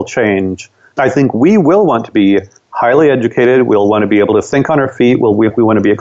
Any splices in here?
no; 0 cuts

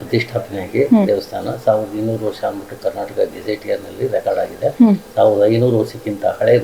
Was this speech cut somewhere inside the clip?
no; 0 cuts

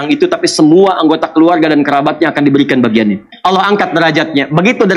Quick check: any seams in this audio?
yes; 1 cut; at 3.3 s

